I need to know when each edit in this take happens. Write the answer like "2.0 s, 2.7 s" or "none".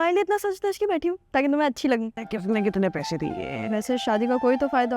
2.2 s